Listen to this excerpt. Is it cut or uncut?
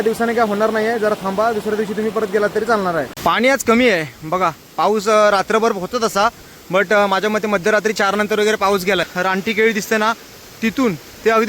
cut